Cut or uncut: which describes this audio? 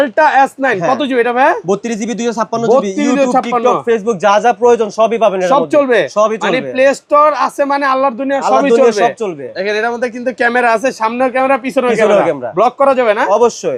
uncut